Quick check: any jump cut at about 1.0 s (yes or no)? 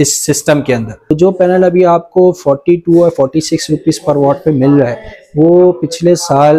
yes